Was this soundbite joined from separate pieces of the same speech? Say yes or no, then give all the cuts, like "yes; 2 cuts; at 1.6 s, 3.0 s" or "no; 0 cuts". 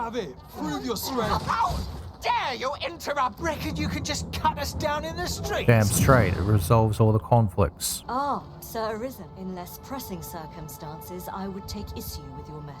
yes; 2 cuts; at 3.4 s, 8.0 s